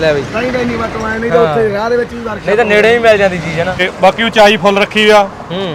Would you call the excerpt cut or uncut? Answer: cut